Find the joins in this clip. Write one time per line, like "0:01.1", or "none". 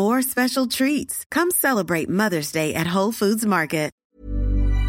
0:04.0